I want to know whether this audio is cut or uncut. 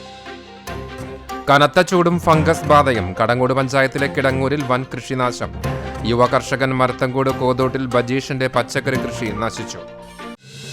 cut